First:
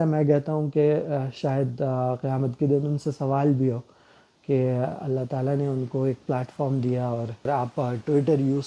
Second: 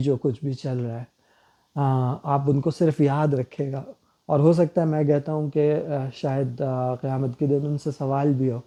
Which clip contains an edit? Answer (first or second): first